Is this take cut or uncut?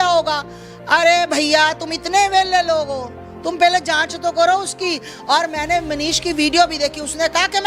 uncut